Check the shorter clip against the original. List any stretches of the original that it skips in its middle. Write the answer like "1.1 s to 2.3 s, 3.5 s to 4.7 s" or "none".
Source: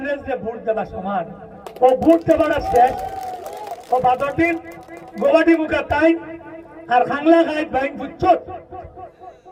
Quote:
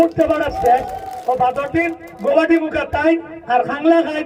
3.2 s to 3.7 s, 4.7 s to 5.0 s, 6.3 s to 6.8 s